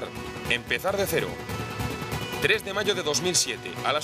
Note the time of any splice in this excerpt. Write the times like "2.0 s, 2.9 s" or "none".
1.6 s